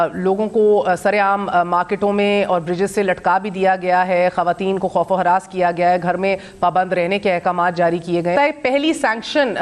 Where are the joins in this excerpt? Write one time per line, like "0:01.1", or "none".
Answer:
0:08.3